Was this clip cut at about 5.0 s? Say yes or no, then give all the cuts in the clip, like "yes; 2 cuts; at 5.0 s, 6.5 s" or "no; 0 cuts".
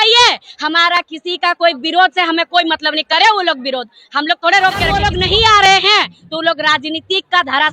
yes; 1 cut; at 5.0 s